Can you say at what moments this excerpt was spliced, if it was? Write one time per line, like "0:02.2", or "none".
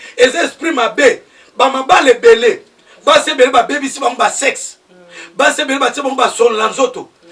none